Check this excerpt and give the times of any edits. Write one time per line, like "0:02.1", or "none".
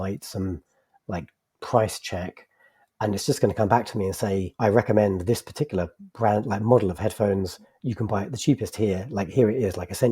0:04.5